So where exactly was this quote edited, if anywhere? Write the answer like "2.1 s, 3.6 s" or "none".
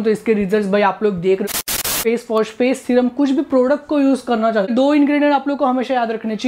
1.8 s, 4.7 s